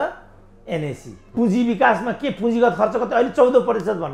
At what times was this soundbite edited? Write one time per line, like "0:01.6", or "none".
0:01.3